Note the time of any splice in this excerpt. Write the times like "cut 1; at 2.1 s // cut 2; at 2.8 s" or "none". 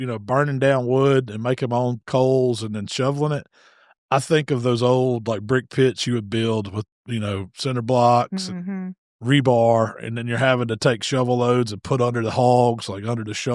none